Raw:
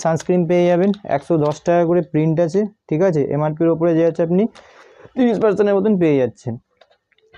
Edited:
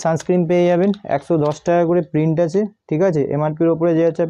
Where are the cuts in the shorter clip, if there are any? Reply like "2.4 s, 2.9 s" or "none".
none